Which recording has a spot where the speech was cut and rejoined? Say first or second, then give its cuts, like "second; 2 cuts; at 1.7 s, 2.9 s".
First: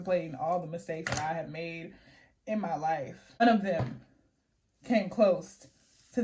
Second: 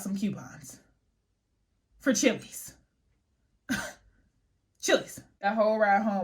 second; 1 cut; at 5.2 s